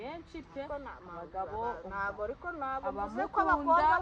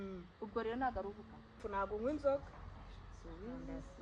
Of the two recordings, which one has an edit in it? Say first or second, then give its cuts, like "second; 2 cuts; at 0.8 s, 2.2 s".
second; 1 cut; at 1.6 s